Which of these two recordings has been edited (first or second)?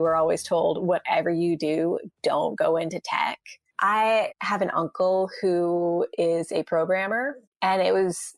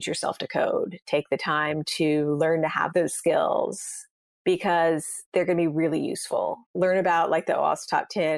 first